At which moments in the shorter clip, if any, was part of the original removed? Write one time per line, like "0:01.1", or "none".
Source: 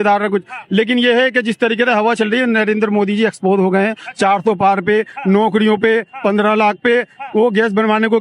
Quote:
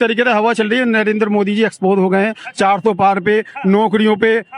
none